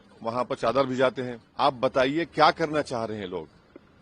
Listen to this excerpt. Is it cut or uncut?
cut